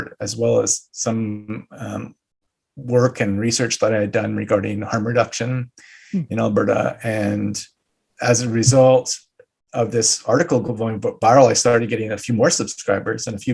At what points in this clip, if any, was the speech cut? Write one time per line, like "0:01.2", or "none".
none